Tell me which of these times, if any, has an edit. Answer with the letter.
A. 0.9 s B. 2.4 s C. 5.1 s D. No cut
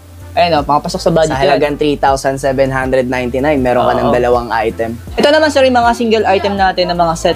C